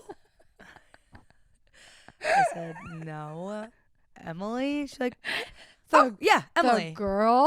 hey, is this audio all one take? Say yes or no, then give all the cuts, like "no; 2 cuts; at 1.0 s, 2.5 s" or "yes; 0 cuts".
yes; 0 cuts